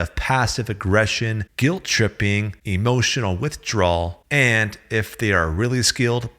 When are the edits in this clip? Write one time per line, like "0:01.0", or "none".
0:01.4
0:02.6
0:04.2